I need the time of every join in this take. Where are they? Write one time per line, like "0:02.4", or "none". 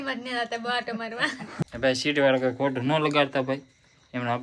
0:01.6